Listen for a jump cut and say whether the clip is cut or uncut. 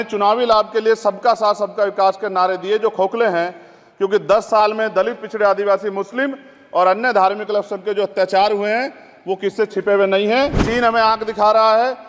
cut